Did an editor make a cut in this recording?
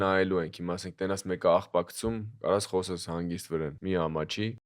yes; 1 cut; at 3.8 s

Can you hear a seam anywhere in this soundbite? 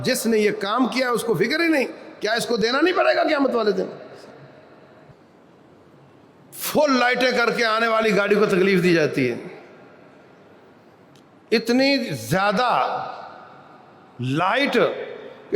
yes; 1 cut; at 5.1 s

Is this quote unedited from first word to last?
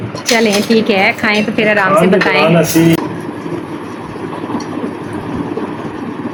yes; 0 cuts

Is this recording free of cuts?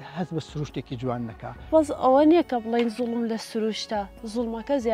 no; 1 cut; at 1.7 s

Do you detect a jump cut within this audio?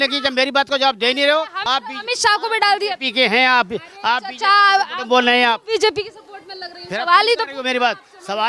yes; 1 cut; at 1.6 s

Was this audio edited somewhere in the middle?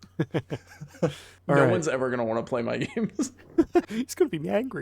yes; 1 cut; at 3.9 s

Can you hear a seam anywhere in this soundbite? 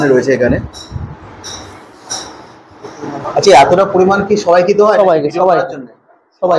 yes; 1 cut; at 3.2 s

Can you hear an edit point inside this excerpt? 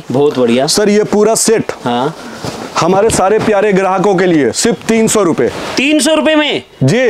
no; 0 cuts

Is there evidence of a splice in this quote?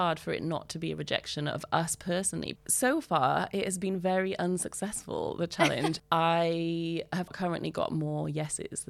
yes; 3 cuts; at 2.6 s, 6.0 s, 7.3 s

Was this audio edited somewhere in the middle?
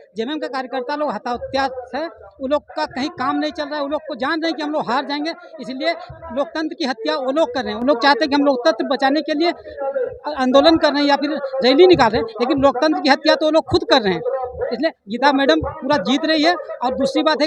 no; 0 cuts

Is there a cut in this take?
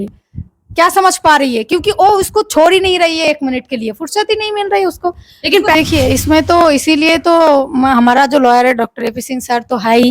yes; 1 cut; at 5.8 s

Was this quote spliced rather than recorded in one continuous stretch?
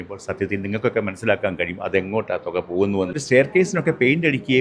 yes; 1 cut; at 3.2 s

